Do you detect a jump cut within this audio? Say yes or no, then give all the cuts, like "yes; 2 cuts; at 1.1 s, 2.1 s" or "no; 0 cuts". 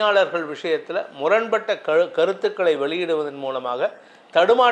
no; 0 cuts